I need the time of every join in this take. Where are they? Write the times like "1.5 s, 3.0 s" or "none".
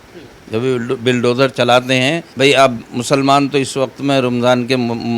2.3 s